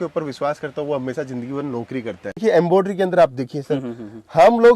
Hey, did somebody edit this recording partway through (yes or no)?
yes